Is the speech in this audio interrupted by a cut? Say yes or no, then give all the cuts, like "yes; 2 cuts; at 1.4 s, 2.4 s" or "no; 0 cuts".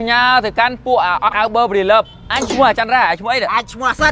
yes; 1 cut; at 1.3 s